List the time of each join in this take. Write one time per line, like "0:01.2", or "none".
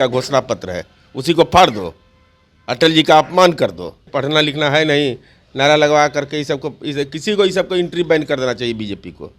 0:04.1